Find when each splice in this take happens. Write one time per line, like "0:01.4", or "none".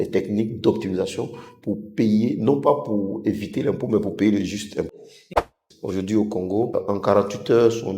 0:05.5
0:06.7